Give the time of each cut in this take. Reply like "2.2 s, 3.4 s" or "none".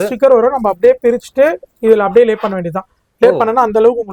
none